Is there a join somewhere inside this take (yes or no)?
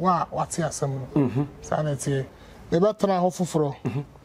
yes